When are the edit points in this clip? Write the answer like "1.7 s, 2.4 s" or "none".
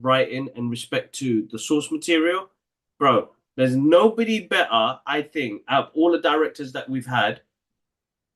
none